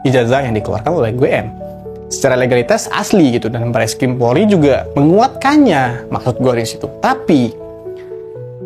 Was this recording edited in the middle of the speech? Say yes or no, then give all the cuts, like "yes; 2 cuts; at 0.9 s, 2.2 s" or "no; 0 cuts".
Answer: no; 0 cuts